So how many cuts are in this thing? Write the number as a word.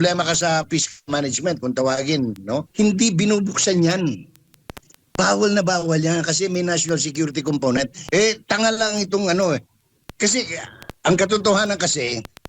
two